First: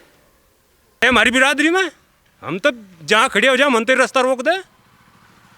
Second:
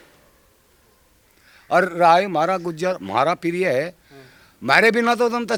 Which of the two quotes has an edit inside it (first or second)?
first